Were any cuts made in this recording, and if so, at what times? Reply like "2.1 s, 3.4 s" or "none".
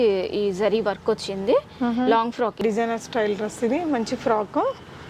2.6 s